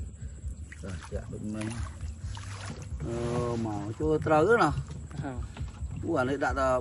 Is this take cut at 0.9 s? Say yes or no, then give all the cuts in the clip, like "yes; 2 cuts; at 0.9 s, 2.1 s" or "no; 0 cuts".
no; 0 cuts